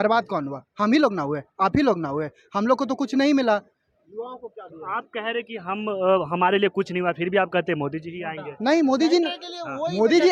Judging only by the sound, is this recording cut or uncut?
uncut